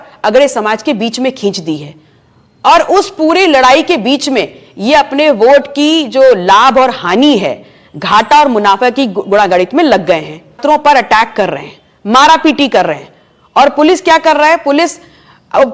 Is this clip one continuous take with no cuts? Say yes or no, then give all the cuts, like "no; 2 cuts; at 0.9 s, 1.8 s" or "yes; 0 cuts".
no; 1 cut; at 10.6 s